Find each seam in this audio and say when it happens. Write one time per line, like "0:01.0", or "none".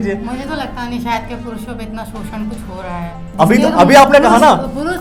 none